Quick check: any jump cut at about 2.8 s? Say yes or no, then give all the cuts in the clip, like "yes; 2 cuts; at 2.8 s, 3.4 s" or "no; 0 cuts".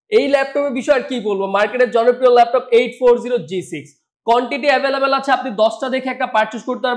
no; 0 cuts